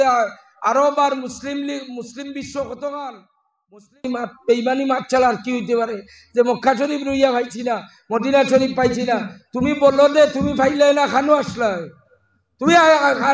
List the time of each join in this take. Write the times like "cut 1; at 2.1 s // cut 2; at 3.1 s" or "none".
cut 1; at 4.0 s